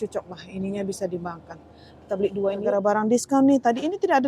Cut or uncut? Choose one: cut